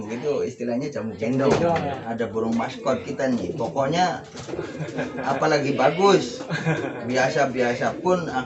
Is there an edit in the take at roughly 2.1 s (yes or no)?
yes